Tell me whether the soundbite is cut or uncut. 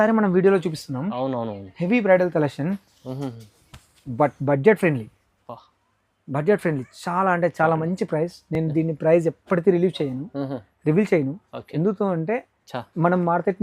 uncut